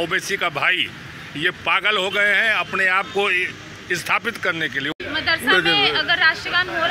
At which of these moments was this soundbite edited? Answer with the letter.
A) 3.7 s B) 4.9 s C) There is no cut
B